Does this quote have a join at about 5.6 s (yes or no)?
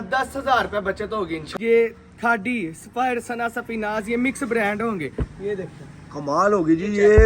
no